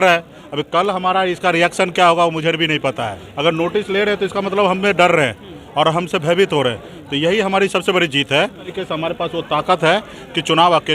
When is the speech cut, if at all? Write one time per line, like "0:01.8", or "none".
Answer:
0:03.2
0:08.7